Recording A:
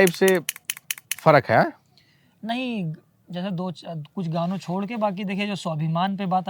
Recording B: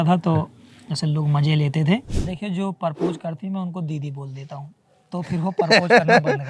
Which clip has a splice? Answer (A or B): B